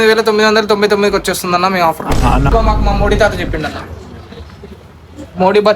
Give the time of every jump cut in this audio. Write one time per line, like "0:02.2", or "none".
0:02.5